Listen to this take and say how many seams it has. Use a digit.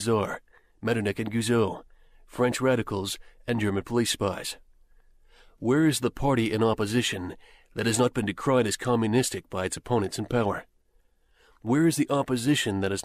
0